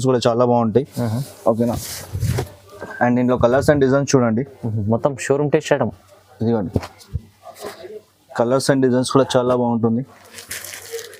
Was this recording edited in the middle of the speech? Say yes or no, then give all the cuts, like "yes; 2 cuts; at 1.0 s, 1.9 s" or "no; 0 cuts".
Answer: no; 0 cuts